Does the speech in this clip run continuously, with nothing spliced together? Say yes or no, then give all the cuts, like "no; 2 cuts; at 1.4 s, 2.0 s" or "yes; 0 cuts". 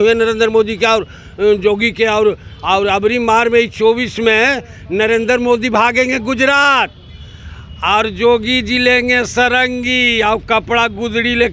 yes; 0 cuts